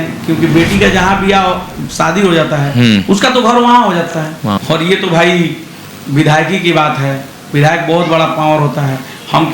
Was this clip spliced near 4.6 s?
yes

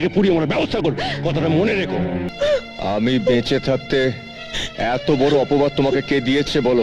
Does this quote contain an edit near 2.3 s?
yes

